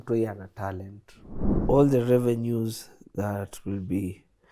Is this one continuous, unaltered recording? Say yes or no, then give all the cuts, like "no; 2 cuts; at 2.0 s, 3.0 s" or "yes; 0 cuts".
no; 1 cut; at 1.6 s